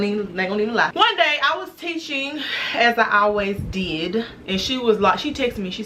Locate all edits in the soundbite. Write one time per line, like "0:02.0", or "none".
0:00.9
0:02.6
0:04.4